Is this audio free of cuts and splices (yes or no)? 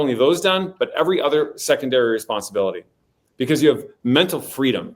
no